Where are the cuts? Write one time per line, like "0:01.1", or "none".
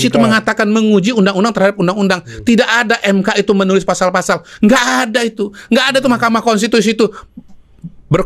none